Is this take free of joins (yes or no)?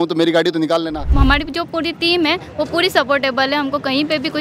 no